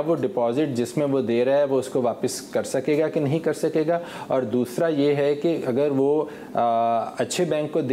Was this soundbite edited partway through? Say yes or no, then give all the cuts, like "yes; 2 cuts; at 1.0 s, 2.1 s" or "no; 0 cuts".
no; 0 cuts